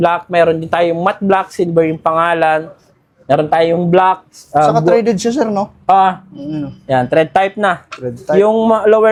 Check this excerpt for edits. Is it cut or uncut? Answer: uncut